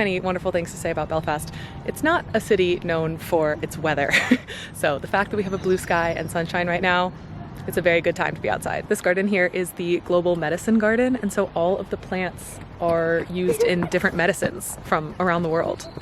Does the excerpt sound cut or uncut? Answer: uncut